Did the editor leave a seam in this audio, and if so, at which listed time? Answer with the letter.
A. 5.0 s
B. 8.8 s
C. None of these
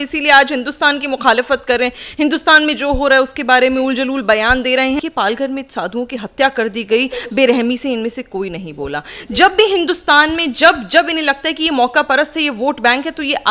A